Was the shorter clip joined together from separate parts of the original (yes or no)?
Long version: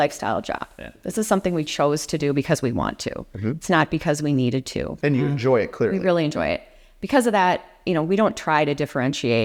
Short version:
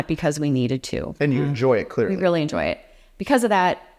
no